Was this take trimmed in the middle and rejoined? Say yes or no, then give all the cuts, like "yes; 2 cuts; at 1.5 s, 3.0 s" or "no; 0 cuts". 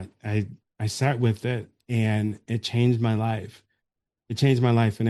no; 0 cuts